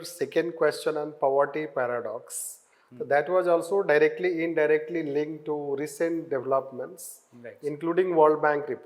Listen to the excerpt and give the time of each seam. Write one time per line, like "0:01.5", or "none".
none